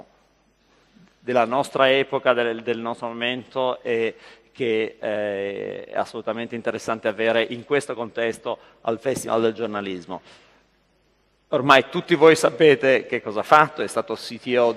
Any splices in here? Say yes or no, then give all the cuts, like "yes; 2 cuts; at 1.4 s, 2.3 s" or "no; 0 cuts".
yes; 1 cut; at 8.7 s